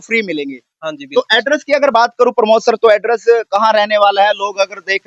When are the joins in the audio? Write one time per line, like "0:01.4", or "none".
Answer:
none